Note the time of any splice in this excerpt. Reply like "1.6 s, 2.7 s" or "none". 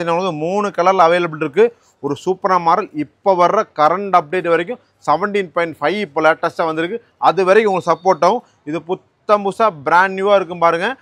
none